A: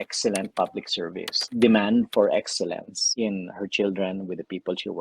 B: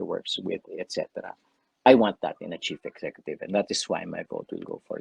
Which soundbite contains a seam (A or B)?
A